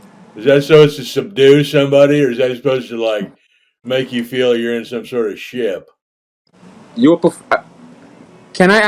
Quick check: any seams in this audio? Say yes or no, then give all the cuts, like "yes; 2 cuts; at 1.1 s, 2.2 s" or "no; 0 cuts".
no; 0 cuts